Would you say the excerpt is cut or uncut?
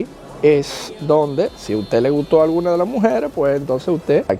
uncut